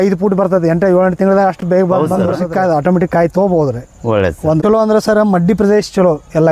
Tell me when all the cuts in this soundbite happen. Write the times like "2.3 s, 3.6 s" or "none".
1.9 s, 4.6 s